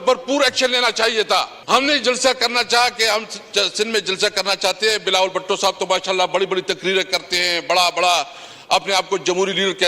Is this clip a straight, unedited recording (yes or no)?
no